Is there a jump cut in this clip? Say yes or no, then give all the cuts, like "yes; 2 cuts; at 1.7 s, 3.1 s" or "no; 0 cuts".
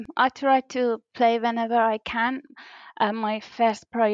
no; 0 cuts